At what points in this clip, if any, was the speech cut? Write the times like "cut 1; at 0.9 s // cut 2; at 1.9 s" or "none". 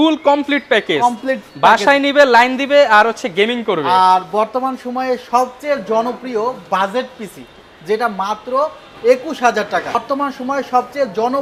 none